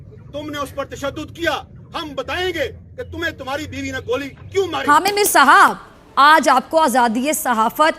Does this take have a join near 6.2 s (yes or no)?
no